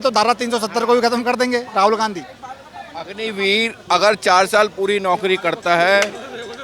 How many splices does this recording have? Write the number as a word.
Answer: zero